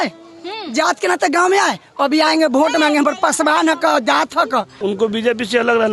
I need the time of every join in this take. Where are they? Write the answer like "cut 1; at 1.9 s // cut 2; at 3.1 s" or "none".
cut 1; at 4.7 s